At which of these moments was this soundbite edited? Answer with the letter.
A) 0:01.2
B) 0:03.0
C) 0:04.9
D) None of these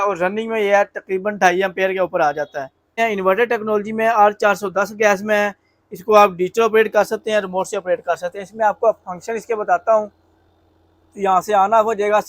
B